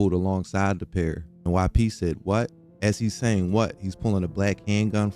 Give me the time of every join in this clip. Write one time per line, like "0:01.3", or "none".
0:01.4